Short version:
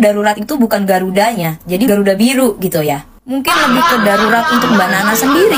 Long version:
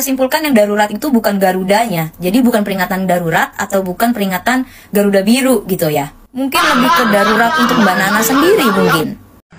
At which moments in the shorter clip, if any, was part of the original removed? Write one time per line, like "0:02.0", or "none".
0:01.9

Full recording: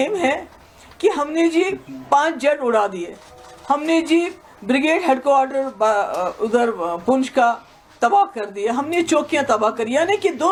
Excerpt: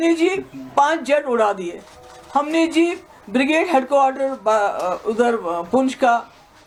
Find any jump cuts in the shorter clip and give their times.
none

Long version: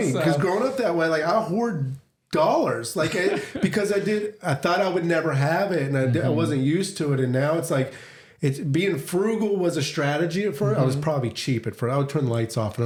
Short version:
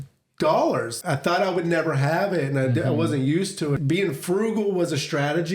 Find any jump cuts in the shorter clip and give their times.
0:00.9
0:03.8

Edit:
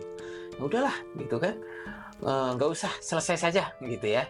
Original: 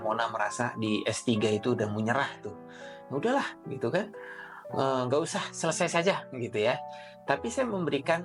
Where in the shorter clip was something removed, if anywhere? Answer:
none

